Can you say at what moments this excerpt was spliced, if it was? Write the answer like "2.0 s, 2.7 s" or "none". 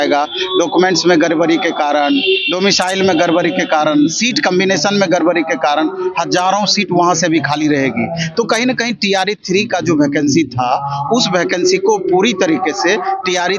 none